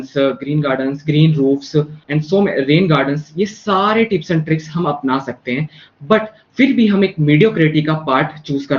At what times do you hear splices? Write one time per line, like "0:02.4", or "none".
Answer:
0:02.0